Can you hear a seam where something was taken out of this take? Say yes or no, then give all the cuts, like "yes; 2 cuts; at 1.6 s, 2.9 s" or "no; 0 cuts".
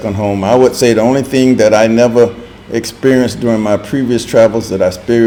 no; 0 cuts